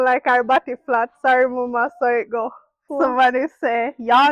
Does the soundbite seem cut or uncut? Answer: cut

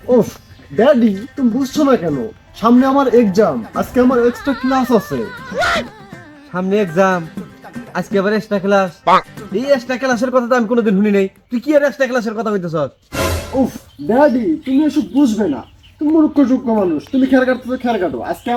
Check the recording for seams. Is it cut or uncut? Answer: uncut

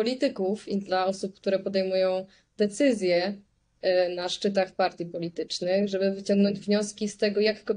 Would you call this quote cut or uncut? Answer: uncut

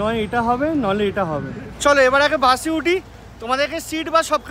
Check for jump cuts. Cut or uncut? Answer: uncut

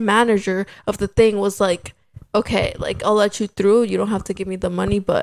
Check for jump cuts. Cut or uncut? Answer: uncut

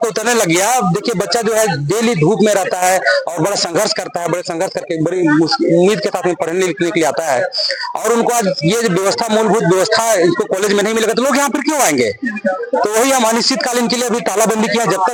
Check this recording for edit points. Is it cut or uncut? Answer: uncut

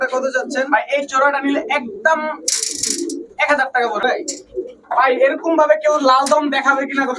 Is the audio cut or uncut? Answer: cut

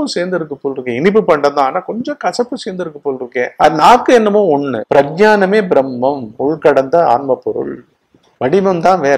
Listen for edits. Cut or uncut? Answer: cut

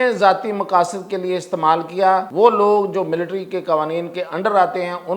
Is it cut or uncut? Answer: cut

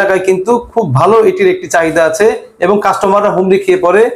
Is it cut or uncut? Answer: uncut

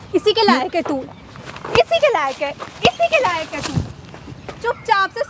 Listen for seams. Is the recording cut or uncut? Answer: uncut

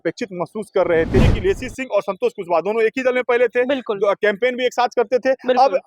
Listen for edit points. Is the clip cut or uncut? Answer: cut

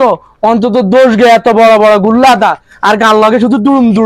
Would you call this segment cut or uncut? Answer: uncut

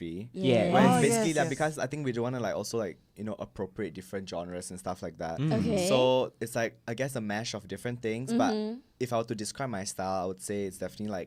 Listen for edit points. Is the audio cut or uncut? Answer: uncut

